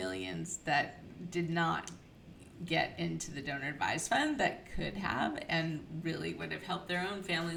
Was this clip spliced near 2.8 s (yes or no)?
no